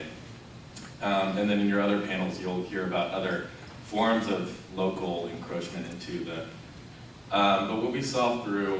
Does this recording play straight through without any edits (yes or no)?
yes